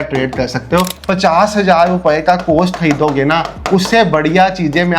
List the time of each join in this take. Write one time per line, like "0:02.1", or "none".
0:00.9

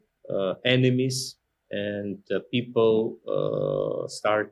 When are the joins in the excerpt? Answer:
none

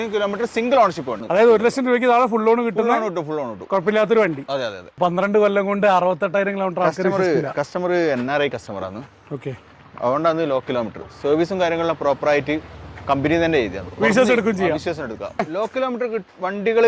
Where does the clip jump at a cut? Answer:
0:01.2
0:04.9
0:15.4

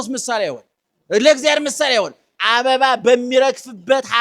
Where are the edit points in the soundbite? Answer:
0:02.3

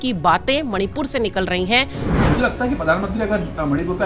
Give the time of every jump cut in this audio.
0:02.0

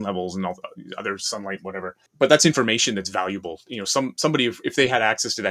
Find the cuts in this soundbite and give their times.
0:02.0

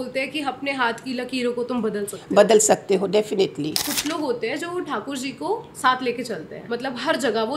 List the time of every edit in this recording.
0:03.9
0:06.5

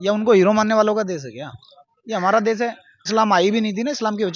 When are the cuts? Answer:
0:03.1

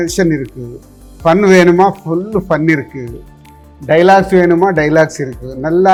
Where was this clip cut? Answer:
none

